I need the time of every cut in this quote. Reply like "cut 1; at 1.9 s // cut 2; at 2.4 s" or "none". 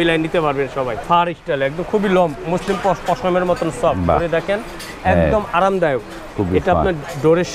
cut 1; at 1.0 s